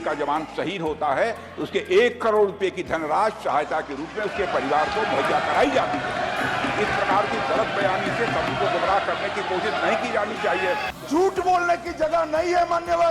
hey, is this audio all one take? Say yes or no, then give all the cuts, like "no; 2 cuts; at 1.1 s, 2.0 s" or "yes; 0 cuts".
no; 1 cut; at 10.9 s